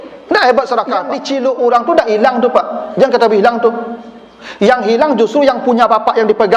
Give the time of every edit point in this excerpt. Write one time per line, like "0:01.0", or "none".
0:01.1